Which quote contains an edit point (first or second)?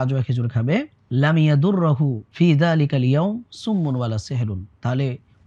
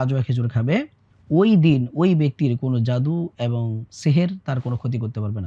second